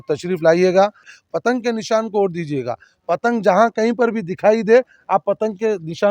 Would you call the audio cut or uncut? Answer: cut